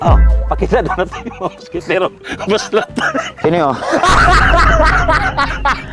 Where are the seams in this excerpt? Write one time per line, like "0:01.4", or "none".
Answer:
none